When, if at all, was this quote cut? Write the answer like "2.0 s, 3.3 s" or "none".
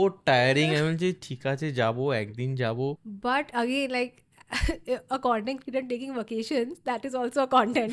3.1 s

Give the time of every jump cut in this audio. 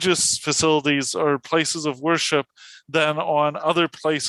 none

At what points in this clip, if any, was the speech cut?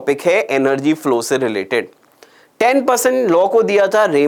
none

